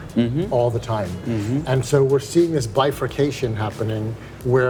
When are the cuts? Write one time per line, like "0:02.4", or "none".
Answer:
none